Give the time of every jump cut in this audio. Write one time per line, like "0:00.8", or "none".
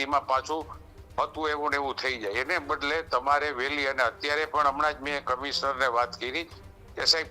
none